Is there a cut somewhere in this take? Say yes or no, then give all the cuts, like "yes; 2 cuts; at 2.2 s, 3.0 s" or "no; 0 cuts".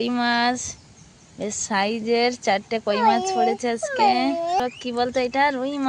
yes; 1 cut; at 4.6 s